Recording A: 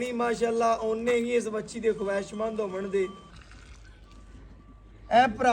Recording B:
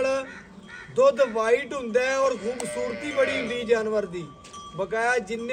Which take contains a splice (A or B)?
A